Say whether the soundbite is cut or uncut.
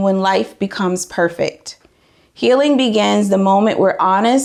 uncut